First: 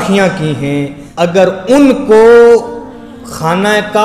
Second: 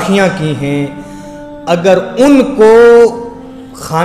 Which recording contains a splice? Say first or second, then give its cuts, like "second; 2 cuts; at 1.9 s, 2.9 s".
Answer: first; 1 cut; at 1.0 s